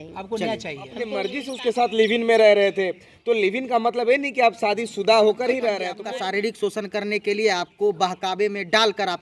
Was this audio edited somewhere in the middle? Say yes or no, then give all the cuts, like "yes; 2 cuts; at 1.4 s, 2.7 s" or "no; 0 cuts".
yes; 2 cuts; at 1.1 s, 5.9 s